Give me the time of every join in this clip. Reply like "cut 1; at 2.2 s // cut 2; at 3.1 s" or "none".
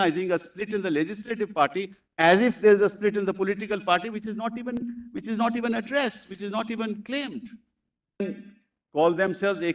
cut 1; at 8.2 s